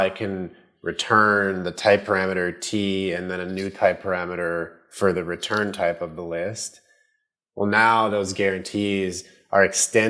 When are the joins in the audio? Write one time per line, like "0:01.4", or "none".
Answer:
none